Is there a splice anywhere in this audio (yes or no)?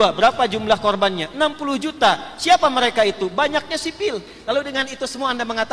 yes